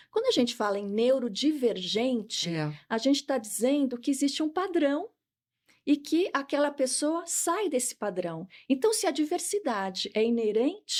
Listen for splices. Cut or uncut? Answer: uncut